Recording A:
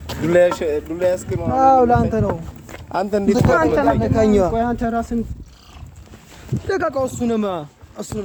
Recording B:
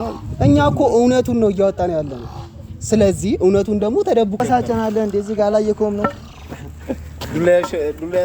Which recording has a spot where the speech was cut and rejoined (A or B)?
B